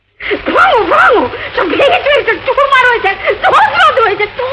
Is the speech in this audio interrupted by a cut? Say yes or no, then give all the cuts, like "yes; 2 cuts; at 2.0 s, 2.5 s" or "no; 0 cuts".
no; 0 cuts